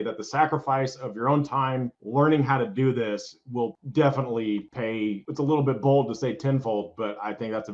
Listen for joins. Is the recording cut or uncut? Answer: uncut